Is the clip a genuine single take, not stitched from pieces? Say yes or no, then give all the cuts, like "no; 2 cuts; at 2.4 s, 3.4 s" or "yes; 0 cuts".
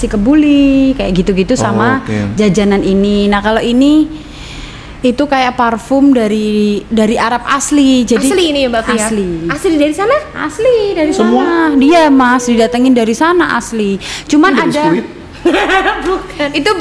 yes; 0 cuts